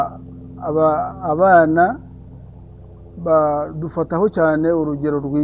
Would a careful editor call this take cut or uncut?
uncut